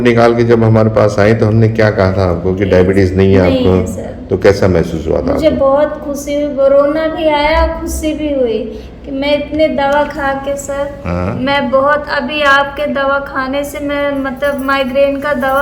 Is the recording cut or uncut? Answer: uncut